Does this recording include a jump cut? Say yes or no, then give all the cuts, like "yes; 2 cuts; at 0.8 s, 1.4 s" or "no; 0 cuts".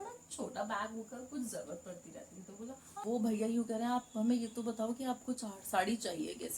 yes; 1 cut; at 3.0 s